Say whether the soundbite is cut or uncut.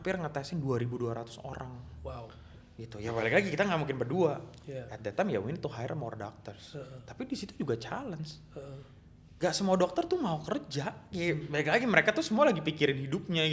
uncut